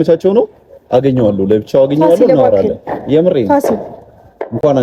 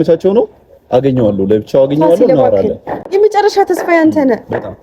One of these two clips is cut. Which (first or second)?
second